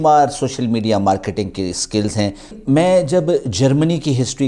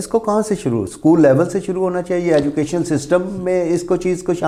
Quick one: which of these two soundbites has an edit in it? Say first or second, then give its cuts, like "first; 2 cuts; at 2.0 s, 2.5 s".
first; 1 cut; at 2.6 s